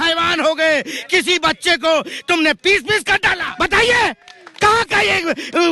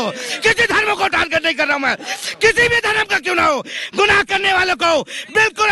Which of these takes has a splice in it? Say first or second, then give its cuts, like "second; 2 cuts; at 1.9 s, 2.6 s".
first; 1 cut; at 3.4 s